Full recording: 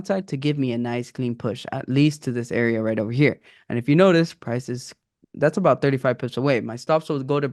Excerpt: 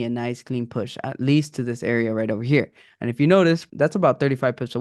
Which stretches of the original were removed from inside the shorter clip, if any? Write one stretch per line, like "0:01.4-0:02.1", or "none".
0:04.4-0:05.3